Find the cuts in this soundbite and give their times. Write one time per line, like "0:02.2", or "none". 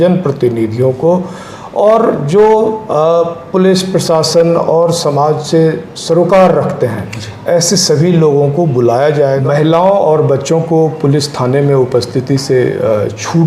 0:09.4